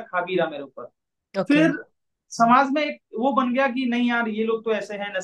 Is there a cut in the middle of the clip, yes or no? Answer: no